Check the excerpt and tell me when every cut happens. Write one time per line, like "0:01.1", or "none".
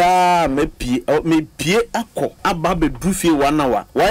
0:02.4